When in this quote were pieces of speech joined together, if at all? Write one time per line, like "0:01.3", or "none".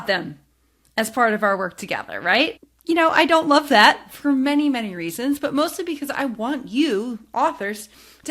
none